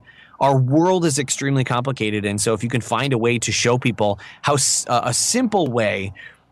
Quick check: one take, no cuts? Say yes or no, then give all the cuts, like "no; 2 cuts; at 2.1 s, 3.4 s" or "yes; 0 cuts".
yes; 0 cuts